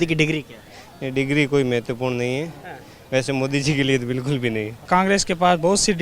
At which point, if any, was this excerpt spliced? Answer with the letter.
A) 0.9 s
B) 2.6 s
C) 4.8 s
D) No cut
C